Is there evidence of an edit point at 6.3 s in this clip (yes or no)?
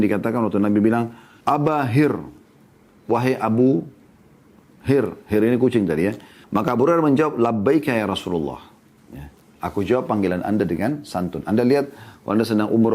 yes